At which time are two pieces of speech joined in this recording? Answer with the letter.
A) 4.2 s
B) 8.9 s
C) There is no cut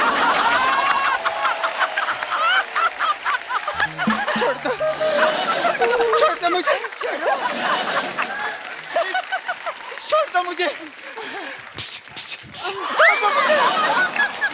A